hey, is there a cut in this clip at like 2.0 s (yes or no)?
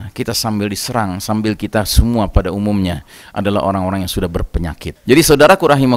no